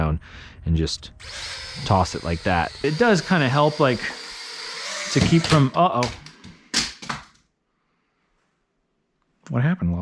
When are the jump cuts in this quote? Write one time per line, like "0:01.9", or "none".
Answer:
0:02.8